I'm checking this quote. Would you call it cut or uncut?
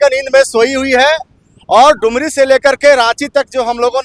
uncut